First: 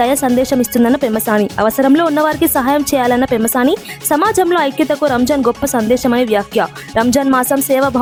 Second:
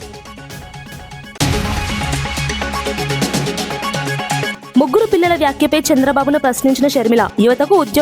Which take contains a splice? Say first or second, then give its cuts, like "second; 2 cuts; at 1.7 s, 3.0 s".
second; 2 cuts; at 1.2 s, 4.5 s